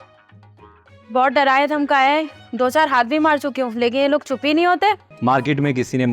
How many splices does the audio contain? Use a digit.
1